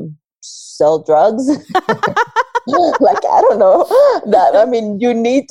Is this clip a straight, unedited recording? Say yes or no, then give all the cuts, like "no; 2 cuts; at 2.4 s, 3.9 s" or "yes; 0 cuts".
yes; 0 cuts